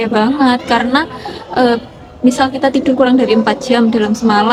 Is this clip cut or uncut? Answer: uncut